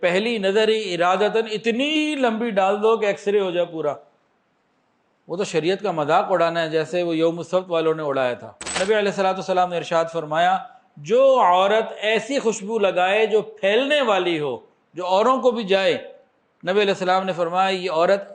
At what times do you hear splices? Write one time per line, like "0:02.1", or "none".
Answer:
0:08.6